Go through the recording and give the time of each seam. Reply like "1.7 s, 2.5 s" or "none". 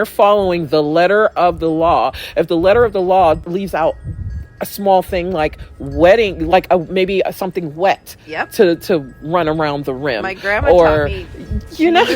3.4 s